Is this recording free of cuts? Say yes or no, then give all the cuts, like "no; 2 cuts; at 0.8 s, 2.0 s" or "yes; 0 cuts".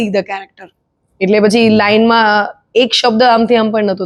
yes; 0 cuts